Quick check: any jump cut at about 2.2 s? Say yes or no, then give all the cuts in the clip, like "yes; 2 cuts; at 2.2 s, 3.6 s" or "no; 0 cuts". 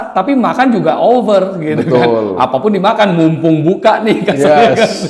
no; 0 cuts